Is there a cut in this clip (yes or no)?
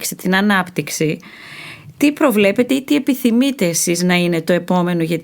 no